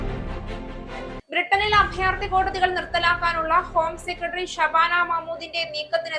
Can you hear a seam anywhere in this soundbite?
yes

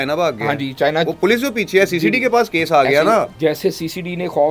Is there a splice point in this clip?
yes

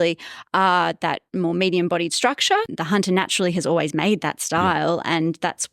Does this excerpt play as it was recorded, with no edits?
no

